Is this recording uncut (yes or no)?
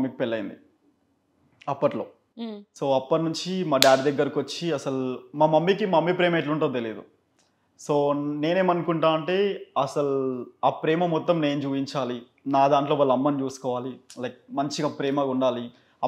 yes